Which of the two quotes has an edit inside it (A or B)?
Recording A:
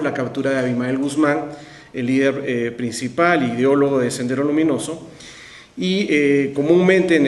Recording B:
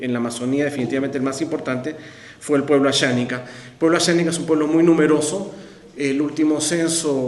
A